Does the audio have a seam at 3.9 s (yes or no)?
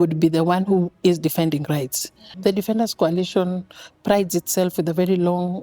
no